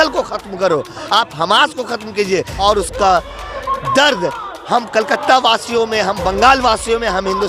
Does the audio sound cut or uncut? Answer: cut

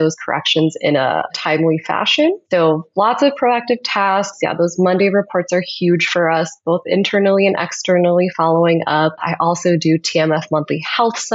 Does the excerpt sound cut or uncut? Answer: cut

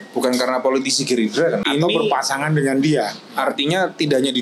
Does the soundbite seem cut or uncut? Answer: cut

